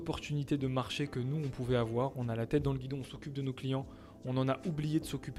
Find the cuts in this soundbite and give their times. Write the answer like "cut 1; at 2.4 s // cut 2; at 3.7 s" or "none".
none